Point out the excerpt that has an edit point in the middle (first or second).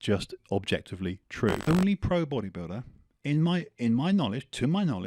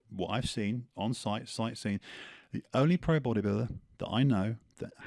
first